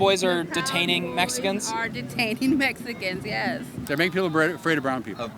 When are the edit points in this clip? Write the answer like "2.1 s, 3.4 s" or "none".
3.7 s